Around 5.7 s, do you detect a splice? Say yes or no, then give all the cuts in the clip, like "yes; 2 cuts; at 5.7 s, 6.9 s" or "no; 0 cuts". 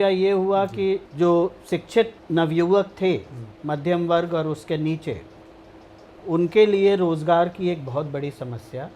no; 2 cuts; at 1.1 s, 2.2 s